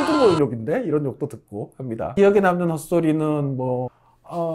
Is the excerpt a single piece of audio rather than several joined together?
no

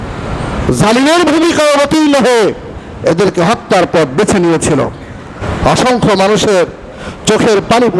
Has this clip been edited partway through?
yes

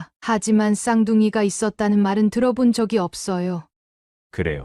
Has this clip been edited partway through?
yes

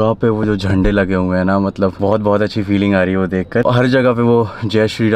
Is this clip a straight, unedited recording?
yes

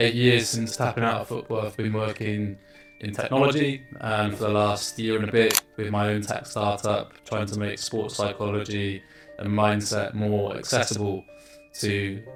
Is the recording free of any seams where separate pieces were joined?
yes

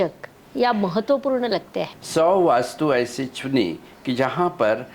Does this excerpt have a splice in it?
yes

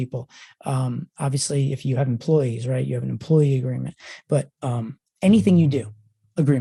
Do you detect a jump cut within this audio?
no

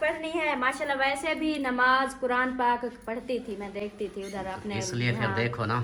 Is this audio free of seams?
yes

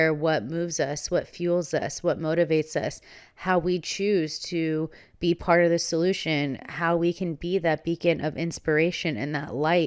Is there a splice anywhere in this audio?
no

